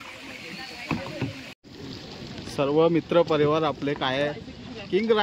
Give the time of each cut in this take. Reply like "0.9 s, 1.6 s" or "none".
1.7 s